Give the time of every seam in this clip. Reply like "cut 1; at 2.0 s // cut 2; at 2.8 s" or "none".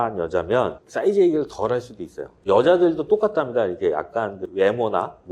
cut 1; at 2.3 s